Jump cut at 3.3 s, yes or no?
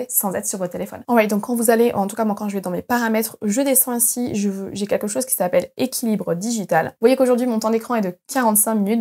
no